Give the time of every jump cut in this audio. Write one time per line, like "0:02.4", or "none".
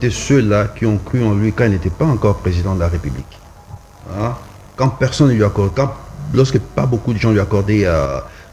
none